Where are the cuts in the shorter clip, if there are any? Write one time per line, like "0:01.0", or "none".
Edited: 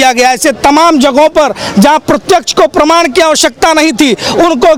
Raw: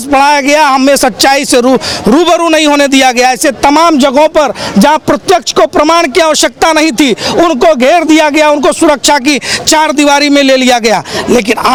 none